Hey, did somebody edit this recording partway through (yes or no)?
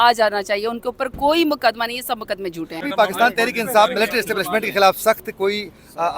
yes